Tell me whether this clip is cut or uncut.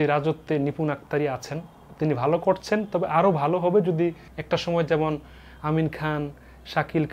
cut